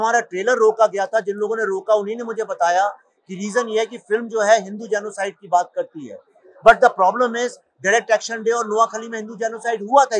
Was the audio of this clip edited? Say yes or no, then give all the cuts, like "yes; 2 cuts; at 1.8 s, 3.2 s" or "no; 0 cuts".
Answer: no; 0 cuts